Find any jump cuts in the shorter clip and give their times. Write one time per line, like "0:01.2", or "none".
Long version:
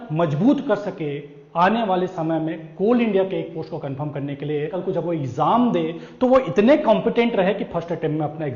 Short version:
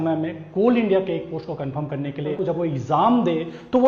0:02.3

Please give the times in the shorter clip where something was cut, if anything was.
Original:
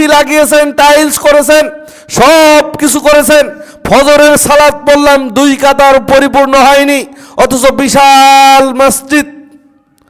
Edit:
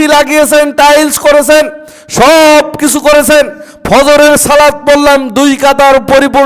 none

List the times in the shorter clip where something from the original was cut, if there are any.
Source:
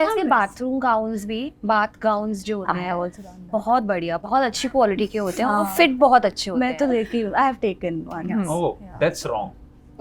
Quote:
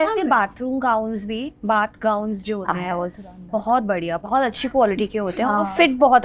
none

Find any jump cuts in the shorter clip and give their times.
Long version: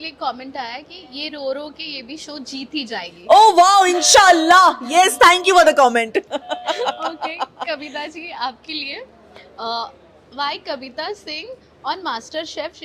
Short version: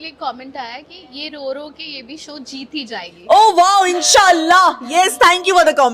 none

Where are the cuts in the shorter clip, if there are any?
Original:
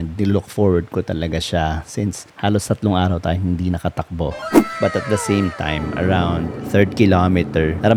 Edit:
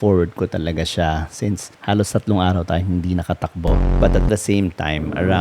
0:03.9

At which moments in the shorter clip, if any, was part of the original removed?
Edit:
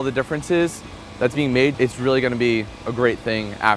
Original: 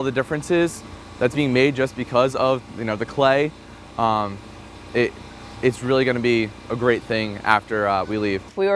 0:01.7

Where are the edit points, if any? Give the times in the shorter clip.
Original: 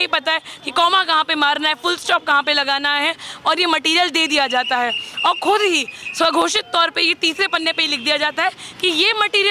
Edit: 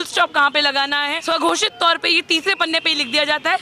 0:01.1

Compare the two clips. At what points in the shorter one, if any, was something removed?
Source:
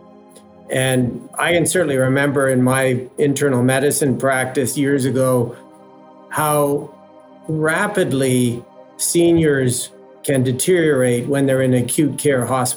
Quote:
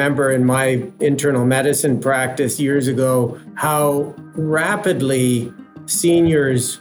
0:03.5
0:04.2

